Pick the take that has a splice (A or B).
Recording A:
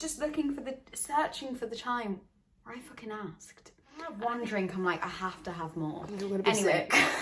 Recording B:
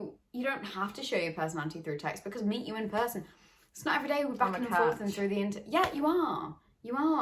A